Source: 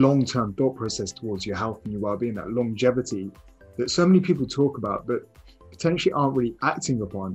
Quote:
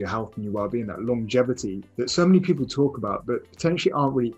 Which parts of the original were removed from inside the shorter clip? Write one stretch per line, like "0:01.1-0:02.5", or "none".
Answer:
0:03.3-0:03.6
0:05.3-0:05.7